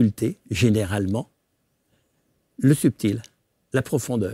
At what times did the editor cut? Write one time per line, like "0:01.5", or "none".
none